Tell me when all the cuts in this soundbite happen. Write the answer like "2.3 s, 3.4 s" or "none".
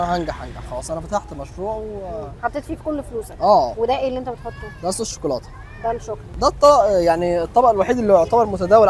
3.7 s, 6.3 s